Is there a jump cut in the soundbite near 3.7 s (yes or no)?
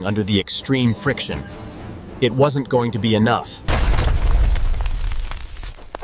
yes